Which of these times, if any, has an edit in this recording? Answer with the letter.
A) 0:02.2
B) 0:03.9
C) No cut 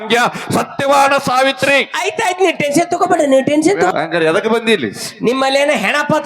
B